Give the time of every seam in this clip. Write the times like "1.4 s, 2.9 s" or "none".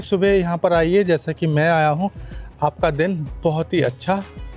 none